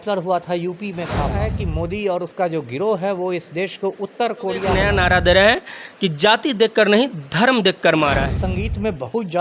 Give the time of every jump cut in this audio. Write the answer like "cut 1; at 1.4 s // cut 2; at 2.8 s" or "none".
cut 1; at 1.4 s // cut 2; at 4.7 s // cut 3; at 8.4 s